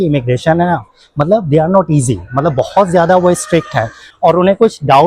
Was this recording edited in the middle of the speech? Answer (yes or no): yes